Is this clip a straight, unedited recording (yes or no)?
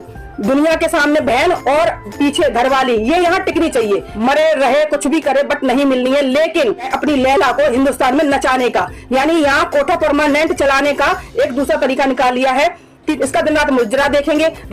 no